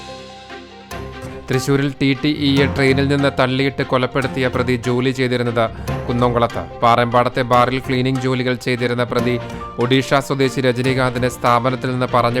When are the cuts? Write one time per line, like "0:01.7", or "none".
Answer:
0:01.3